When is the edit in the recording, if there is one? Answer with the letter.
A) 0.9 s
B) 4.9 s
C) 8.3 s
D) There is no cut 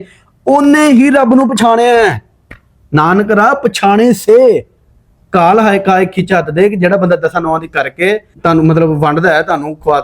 C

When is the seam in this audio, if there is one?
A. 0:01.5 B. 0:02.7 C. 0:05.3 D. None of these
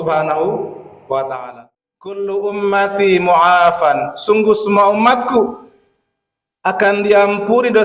A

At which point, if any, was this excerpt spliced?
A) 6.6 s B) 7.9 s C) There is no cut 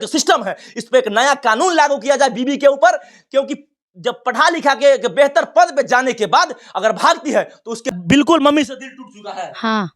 B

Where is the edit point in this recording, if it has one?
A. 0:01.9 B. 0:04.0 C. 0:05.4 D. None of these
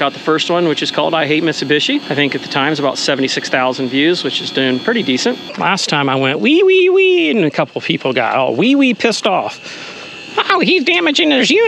C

